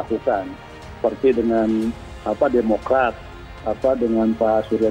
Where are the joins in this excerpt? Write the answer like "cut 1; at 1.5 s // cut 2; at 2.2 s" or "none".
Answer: none